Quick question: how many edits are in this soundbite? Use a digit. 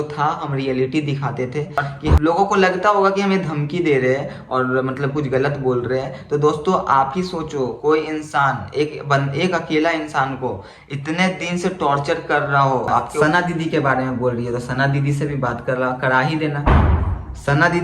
2